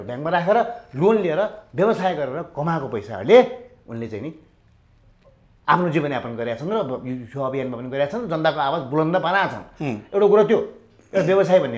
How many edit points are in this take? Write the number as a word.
zero